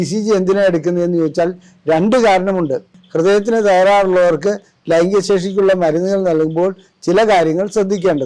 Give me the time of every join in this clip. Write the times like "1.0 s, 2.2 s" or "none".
3.0 s